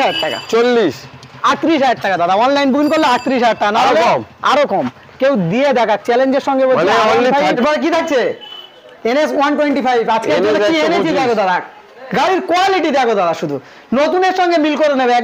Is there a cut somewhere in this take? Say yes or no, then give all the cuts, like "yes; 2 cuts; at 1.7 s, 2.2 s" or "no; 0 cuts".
yes; 1 cut; at 7.6 s